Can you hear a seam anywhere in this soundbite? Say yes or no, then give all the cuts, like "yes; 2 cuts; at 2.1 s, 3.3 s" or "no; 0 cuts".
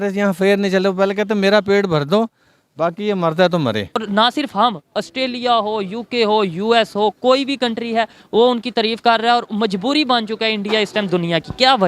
yes; 1 cut; at 4.0 s